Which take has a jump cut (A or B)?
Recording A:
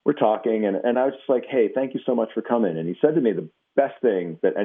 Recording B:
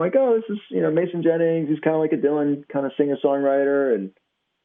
A